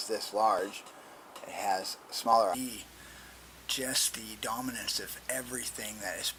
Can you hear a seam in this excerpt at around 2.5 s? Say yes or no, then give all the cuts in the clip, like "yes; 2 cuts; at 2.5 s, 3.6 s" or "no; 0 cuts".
no; 0 cuts